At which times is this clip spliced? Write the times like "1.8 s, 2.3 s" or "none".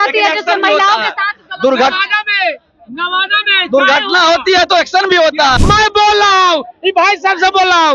5.6 s

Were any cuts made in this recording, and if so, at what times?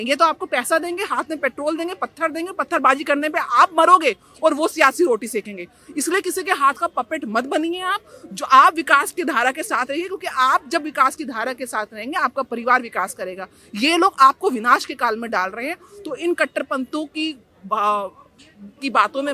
none

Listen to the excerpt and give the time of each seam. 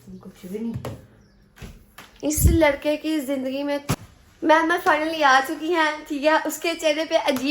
3.9 s

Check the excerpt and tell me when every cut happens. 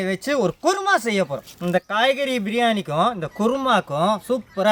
none

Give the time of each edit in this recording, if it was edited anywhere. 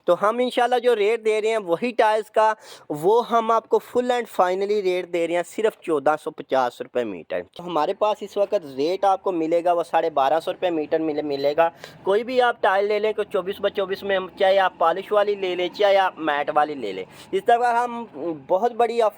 7.6 s

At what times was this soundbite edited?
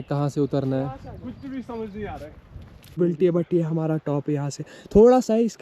3.0 s

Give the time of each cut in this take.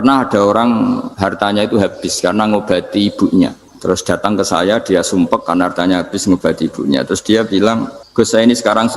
1.1 s, 3.7 s, 8.0 s

